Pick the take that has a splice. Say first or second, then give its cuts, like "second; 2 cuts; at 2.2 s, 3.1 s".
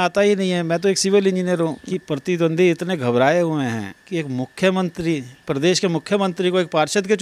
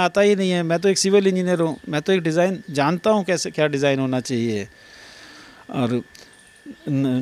first; 1 cut; at 1.8 s